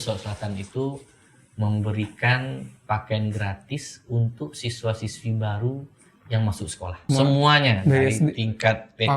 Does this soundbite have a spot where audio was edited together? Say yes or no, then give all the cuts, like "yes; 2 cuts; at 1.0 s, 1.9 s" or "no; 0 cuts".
yes; 1 cut; at 7.0 s